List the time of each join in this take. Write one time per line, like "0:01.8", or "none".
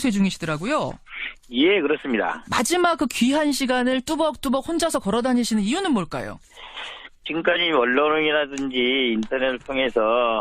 none